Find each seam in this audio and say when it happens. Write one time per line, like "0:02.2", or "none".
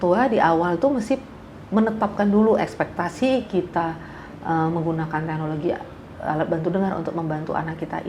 none